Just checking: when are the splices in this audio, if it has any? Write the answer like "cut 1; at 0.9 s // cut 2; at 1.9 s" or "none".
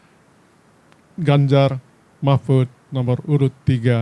none